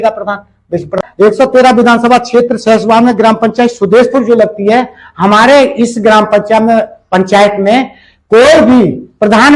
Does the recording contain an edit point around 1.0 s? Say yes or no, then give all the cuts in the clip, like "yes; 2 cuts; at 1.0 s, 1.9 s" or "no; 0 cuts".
yes; 1 cut; at 1.0 s